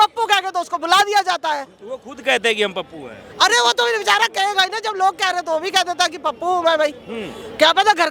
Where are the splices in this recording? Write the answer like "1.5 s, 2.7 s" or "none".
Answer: none